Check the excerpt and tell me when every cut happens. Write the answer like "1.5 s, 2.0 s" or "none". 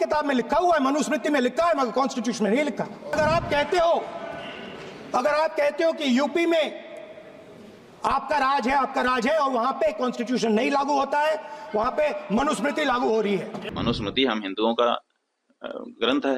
3.1 s, 13.6 s